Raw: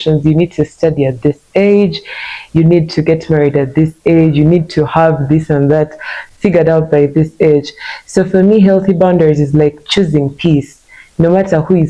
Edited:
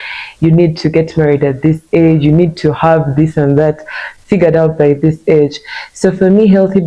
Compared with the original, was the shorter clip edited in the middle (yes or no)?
no